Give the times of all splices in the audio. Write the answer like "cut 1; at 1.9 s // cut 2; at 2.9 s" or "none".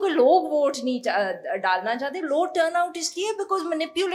none